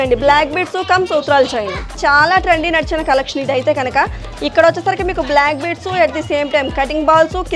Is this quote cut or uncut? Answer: cut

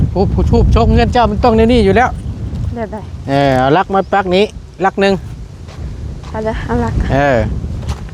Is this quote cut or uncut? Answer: uncut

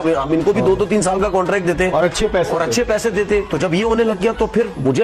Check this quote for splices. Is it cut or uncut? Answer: uncut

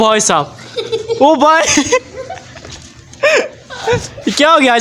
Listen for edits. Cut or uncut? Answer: uncut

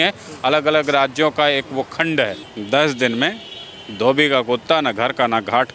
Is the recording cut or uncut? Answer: cut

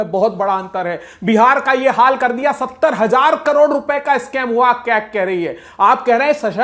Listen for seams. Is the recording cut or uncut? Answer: uncut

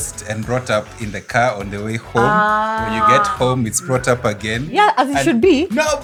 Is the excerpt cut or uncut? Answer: uncut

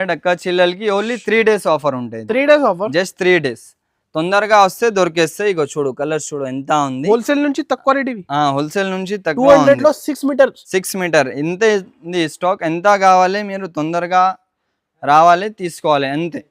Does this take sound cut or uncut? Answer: uncut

